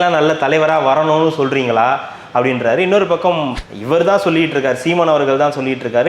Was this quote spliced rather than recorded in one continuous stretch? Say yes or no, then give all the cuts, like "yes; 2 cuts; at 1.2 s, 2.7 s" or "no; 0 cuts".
yes; 1 cut; at 3.5 s